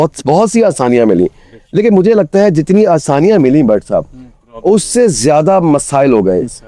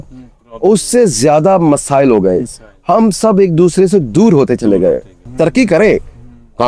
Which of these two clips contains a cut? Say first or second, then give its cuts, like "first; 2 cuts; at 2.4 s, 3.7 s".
second; 1 cut; at 5.3 s